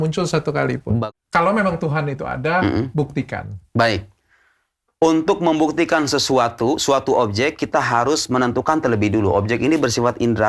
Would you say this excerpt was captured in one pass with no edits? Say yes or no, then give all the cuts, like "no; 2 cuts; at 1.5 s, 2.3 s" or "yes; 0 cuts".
no; 1 cut; at 1.0 s